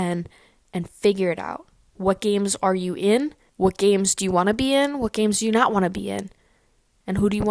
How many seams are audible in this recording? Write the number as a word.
one